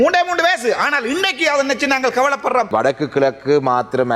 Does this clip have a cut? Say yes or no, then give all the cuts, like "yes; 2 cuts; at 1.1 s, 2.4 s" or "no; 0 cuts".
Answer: yes; 1 cut; at 2.7 s